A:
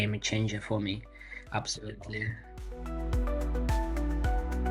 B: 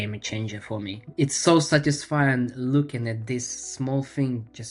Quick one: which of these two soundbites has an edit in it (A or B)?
B